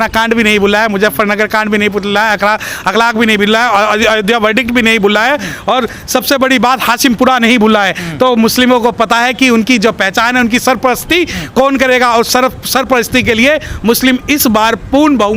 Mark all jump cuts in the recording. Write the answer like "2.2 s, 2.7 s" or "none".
none